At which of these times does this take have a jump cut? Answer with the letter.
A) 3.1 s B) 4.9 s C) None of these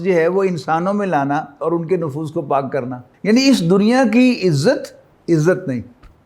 A